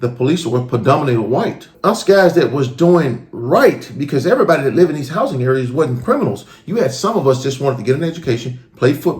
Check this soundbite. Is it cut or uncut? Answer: cut